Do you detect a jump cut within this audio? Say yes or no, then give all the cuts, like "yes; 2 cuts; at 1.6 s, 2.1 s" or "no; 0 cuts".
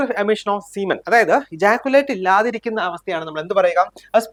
no; 0 cuts